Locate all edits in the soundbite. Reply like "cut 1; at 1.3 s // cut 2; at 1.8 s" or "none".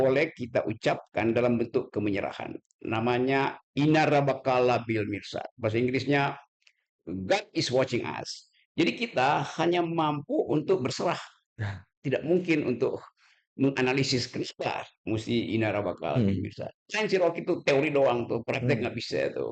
cut 1; at 16.8 s